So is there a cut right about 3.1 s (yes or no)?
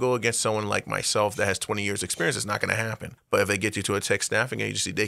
yes